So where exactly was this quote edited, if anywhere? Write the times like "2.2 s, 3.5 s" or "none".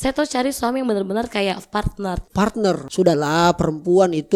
2.8 s